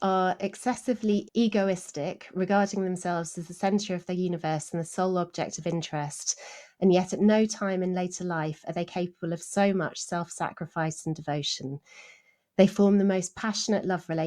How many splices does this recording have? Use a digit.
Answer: 1